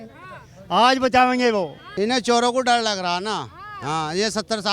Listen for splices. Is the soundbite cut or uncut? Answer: cut